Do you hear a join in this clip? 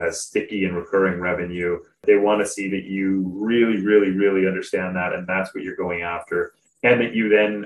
yes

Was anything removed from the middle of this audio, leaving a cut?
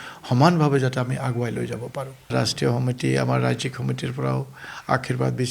yes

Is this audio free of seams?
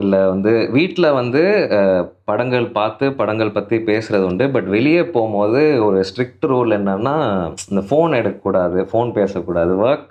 yes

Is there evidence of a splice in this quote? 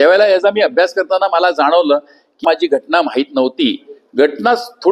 yes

